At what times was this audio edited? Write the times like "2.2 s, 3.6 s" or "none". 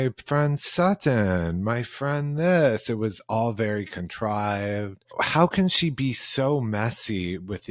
5.1 s